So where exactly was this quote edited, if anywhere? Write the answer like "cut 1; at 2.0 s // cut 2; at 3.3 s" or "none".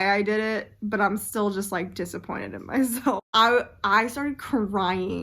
cut 1; at 3.2 s